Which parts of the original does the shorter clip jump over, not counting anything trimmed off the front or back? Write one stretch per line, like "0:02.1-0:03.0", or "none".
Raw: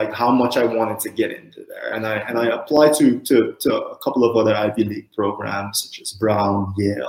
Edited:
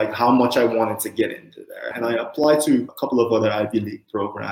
0:01.9-0:02.2
0:03.2-0:03.9